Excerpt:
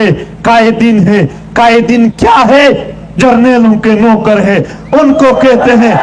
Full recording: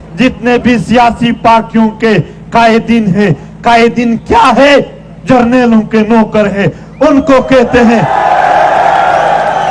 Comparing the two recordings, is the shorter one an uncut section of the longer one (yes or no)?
yes